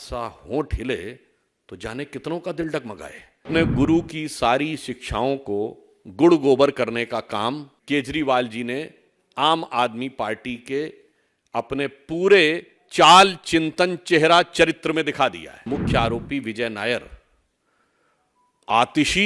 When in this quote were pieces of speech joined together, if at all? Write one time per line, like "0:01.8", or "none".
0:03.5
0:07.7
0:15.5